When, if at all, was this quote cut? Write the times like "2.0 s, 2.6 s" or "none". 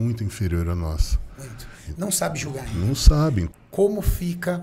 3.5 s